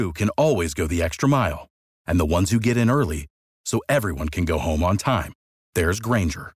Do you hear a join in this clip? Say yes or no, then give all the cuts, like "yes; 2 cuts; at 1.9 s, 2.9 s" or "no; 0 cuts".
no; 0 cuts